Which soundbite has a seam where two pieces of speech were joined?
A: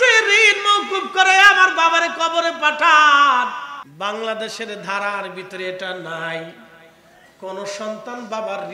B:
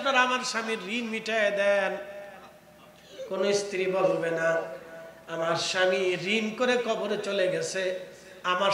A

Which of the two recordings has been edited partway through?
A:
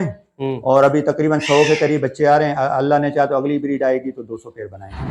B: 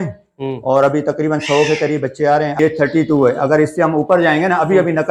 B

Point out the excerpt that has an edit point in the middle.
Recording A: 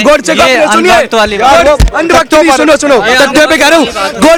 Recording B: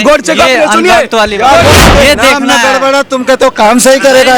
B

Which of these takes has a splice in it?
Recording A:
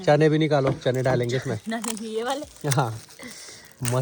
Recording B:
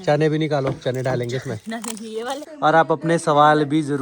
B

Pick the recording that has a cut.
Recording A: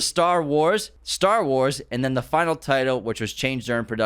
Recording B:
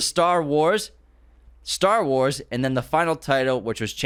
A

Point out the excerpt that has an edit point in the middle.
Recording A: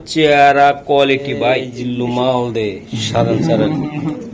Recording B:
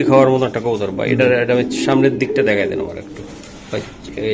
A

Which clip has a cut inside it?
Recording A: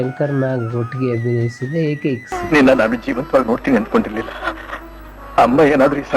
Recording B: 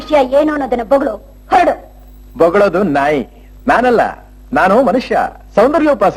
A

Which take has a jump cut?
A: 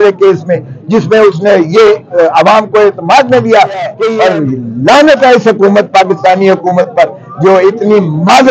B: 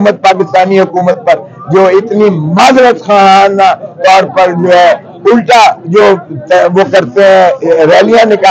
A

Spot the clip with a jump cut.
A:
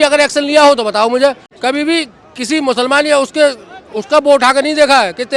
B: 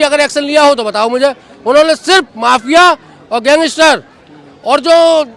A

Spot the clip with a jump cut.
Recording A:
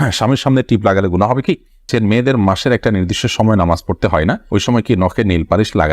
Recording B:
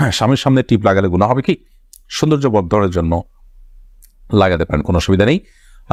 A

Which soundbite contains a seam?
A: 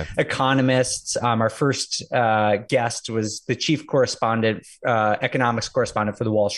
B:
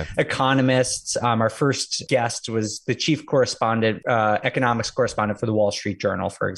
B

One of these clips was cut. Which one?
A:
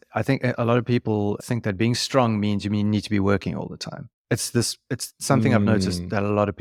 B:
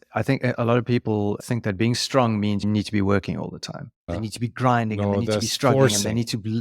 B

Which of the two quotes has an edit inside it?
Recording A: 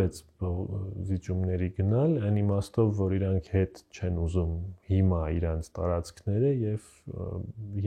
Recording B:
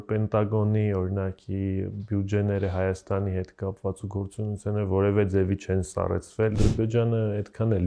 B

